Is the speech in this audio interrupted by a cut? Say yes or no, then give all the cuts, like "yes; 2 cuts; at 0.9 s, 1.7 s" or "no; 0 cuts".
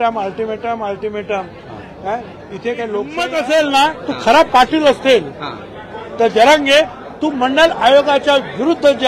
yes; 1 cut; at 3.2 s